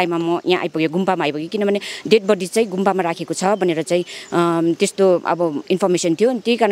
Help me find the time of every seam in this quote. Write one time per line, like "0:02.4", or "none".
none